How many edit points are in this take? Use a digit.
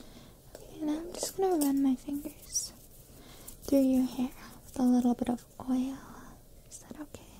0